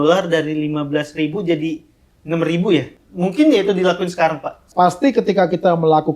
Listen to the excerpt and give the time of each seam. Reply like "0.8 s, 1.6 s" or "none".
3.0 s, 4.7 s